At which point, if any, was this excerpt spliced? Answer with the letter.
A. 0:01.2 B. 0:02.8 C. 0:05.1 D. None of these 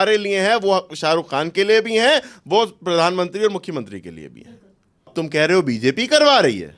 C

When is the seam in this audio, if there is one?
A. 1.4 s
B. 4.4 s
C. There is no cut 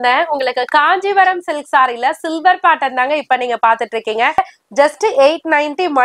B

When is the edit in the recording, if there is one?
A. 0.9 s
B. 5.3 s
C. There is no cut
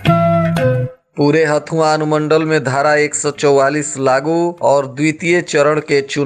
A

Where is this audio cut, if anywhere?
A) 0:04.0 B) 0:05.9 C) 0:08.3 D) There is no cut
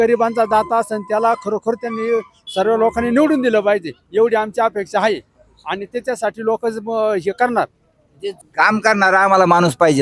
C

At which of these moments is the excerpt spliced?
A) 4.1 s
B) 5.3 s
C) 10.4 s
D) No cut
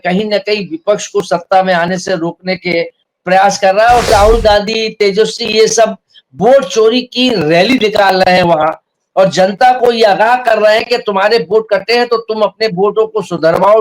A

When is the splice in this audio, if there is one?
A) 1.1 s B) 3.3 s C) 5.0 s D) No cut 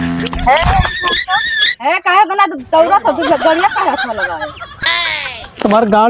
D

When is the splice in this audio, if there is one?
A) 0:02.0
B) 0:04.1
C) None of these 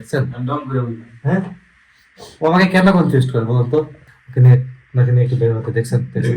B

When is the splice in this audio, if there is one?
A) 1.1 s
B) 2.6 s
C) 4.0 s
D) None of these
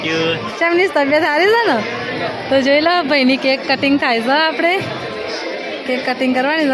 D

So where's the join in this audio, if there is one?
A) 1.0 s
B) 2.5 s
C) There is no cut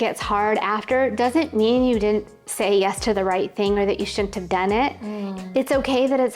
C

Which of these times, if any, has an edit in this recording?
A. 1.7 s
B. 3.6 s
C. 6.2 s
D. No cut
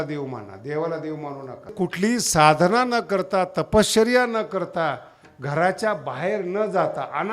A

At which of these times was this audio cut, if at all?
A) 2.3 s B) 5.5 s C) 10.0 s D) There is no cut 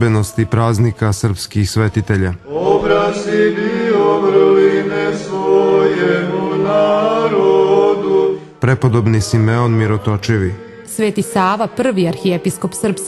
A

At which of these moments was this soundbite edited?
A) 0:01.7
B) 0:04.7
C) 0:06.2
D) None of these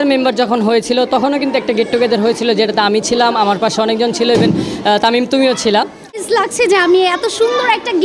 C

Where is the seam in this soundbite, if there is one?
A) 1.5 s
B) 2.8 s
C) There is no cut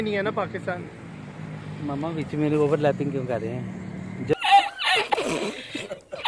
C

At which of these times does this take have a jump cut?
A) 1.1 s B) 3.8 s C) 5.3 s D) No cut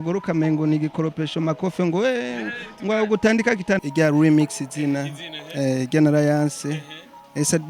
B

